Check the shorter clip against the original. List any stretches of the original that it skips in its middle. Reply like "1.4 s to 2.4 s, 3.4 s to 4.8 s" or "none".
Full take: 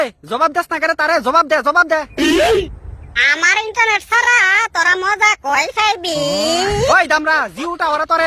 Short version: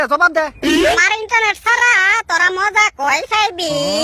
2.5 s to 3.4 s